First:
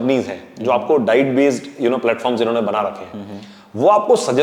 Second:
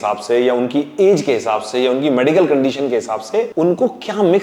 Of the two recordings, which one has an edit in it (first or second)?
second